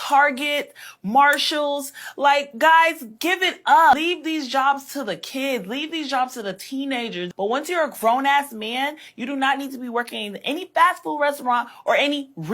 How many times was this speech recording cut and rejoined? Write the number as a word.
two